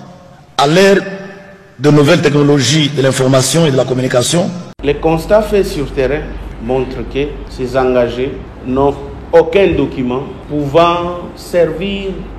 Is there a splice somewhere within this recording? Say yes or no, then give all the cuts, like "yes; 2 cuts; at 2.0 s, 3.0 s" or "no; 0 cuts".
yes; 1 cut; at 4.7 s